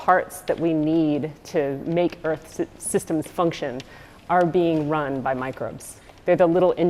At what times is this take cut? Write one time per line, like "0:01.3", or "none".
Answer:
none